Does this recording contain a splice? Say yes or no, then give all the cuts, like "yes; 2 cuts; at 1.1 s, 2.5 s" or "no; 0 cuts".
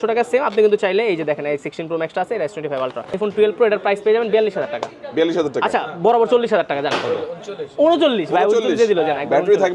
yes; 1 cut; at 3.1 s